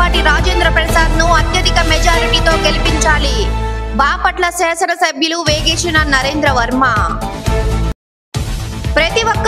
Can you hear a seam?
no; 0 cuts

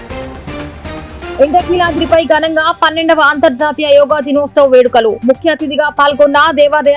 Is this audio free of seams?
yes; 0 cuts

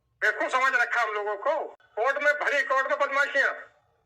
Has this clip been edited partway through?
yes; 1 cut; at 1.8 s

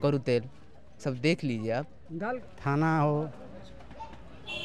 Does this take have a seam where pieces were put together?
yes; 1 cut; at 2.1 s

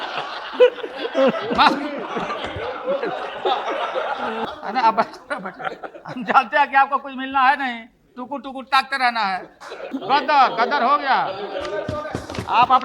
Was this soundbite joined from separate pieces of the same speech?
yes; 2 cuts; at 4.4 s, 9.9 s

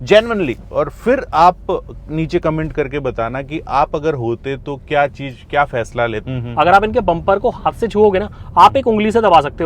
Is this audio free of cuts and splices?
no; 1 cut; at 6.2 s

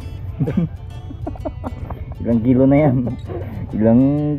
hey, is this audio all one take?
yes; 0 cuts

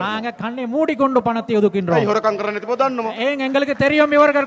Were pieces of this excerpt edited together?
no; 0 cuts

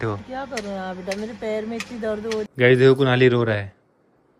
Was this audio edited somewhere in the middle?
yes; 1 cut; at 2.5 s

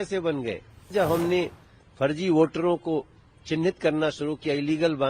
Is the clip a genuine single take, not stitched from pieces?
no; 1 cut; at 0.9 s

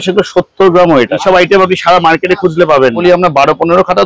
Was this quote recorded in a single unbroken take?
no; 2 cuts; at 1.2 s, 3.0 s

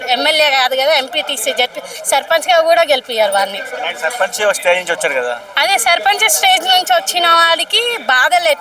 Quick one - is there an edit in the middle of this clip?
no; 0 cuts

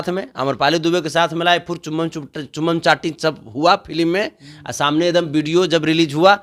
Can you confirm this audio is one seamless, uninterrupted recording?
yes; 0 cuts

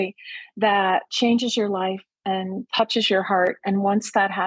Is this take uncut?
no; 1 cut; at 1.1 s

